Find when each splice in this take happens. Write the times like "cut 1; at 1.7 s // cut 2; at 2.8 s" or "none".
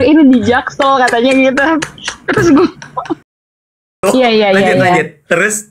cut 1; at 3.8 s